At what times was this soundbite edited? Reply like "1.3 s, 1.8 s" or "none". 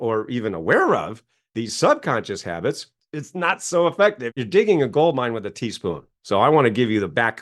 4.4 s